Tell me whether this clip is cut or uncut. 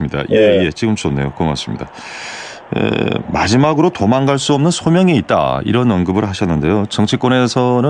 uncut